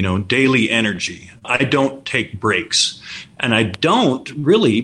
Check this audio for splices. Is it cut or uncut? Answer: cut